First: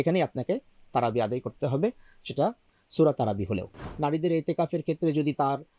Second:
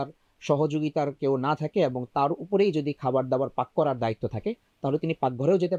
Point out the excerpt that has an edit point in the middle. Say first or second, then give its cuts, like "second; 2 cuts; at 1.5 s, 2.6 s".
first; 1 cut; at 3.8 s